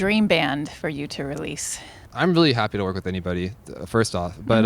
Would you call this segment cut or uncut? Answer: cut